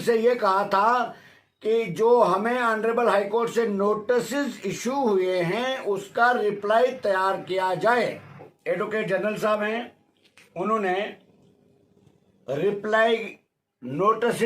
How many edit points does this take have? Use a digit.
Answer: 1